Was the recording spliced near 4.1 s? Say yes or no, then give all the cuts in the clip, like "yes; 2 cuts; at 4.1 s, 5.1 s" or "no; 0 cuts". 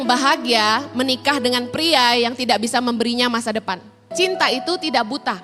yes; 1 cut; at 4.1 s